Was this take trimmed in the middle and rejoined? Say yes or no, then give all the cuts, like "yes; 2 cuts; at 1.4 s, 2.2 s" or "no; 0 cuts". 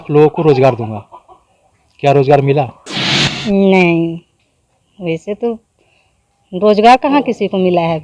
no; 0 cuts